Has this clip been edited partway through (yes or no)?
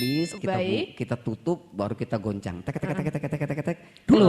no